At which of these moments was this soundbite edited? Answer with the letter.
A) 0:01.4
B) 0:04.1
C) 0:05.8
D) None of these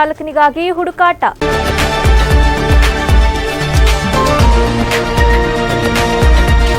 A